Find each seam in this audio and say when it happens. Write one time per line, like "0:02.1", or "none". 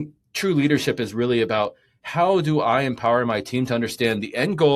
none